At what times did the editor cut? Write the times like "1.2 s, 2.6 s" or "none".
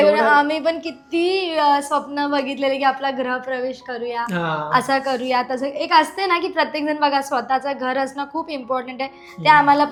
none